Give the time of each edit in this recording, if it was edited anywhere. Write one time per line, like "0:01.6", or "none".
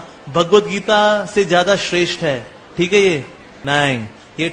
0:03.6